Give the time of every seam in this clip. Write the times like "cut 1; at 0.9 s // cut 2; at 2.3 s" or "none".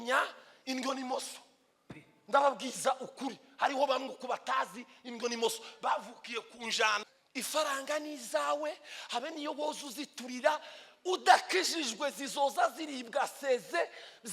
cut 1; at 7.0 s